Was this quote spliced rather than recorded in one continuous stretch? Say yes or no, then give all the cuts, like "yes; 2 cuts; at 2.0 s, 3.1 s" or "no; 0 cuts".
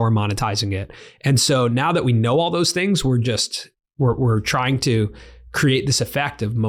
no; 0 cuts